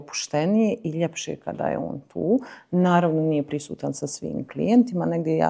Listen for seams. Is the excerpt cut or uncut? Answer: uncut